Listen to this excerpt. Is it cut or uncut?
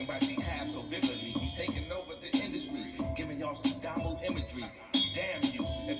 uncut